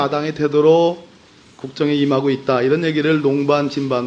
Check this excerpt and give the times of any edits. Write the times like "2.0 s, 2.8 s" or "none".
2.1 s